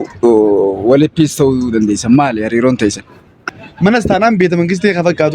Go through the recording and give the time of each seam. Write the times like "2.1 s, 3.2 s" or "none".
3.4 s